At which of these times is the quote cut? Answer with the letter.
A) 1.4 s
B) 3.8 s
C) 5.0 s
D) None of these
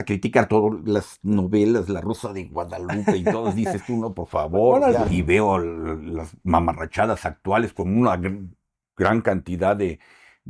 C